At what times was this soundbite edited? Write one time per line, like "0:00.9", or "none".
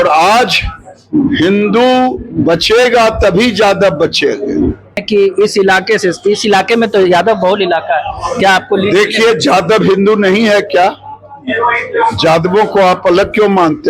0:05.0